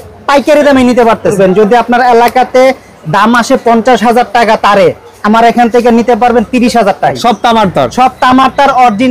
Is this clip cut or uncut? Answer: cut